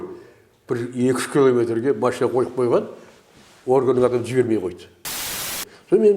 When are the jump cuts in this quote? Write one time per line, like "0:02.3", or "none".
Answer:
0:05.3